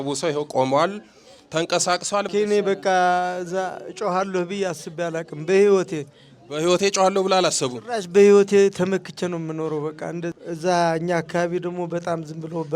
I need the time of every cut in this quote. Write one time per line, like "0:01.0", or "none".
0:02.3